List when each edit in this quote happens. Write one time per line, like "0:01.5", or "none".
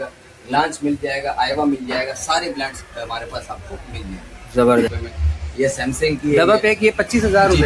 0:04.9